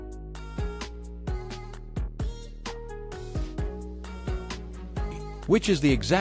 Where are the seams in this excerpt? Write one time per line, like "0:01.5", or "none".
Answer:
0:05.3

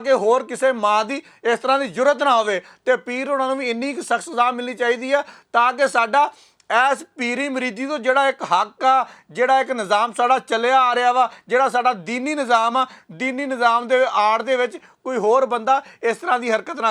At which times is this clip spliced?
none

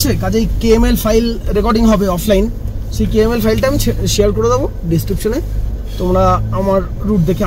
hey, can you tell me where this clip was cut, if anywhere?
none

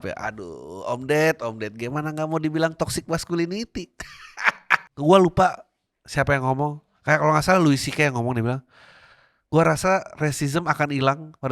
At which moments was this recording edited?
0:04.9

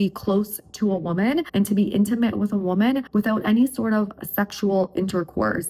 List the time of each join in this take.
0:01.5
0:03.1

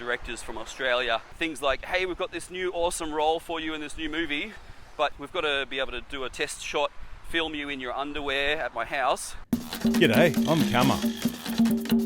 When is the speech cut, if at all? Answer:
0:01.3
0:05.2
0:09.7

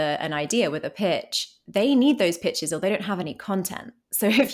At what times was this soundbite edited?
none

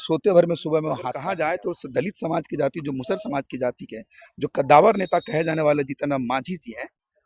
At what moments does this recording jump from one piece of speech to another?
0:01.1

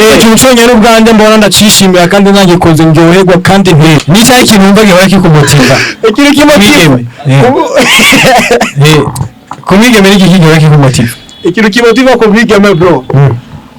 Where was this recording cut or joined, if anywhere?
0:04.0

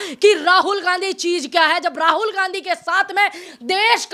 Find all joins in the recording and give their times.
none

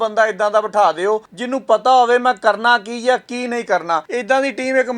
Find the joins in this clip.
0:01.4
0:04.1

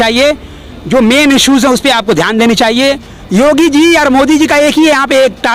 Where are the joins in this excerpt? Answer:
0:03.1

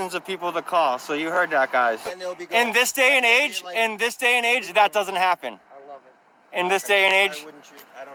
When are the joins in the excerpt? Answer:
none

